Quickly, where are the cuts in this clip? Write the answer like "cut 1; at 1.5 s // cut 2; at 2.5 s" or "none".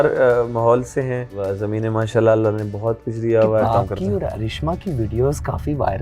cut 1; at 1.3 s // cut 2; at 3.6 s